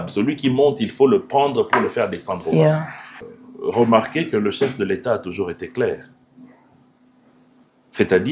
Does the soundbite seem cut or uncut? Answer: cut